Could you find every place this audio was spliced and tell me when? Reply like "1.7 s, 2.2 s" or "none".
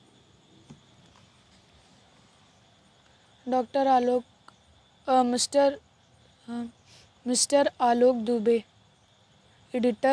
none